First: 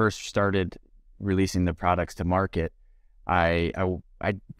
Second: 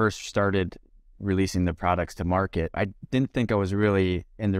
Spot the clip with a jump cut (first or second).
second